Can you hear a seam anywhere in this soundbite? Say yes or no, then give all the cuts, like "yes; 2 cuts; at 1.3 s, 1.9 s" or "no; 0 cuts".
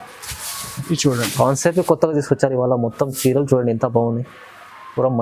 no; 0 cuts